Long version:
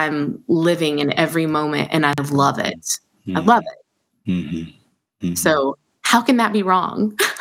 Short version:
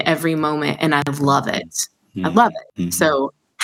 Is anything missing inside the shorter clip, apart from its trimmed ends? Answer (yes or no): yes